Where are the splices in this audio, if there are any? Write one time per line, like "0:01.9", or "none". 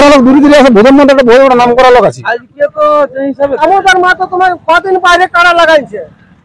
0:03.5